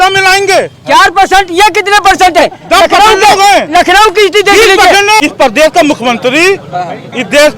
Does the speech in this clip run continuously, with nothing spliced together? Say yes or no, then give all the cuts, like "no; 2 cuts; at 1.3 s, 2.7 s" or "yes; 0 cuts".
no; 1 cut; at 5.2 s